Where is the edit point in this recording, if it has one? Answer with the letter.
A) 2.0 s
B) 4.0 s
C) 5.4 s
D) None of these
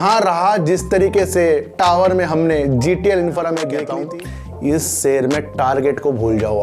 B